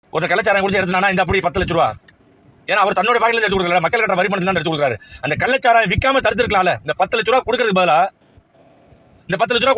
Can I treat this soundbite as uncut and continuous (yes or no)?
yes